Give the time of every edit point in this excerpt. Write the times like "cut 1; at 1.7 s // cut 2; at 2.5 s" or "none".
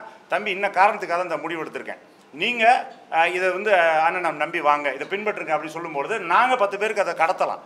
none